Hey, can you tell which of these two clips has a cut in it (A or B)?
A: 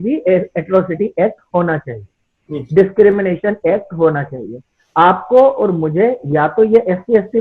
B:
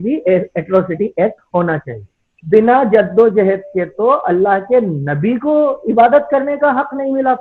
B